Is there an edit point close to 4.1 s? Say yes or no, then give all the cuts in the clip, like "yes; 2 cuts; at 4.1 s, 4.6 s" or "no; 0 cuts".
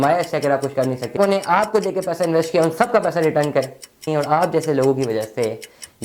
yes; 2 cuts; at 1.2 s, 4.1 s